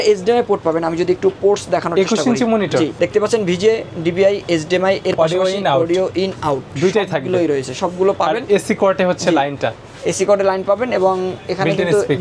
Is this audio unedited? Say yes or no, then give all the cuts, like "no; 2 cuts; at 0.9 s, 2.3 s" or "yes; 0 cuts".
yes; 0 cuts